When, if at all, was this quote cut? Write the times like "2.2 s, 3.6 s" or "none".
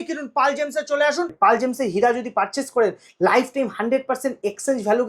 1.3 s